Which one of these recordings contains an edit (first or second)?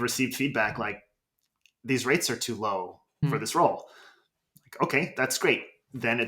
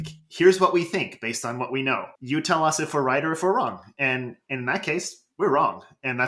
first